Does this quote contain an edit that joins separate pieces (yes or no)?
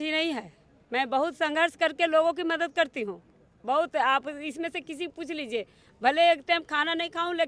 no